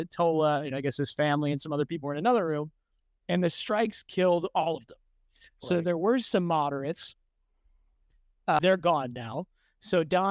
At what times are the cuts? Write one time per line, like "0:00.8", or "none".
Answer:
0:08.6